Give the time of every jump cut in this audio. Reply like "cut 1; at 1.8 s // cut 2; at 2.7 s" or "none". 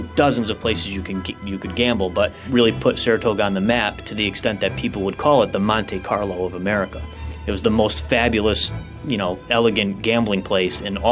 cut 1; at 2.4 s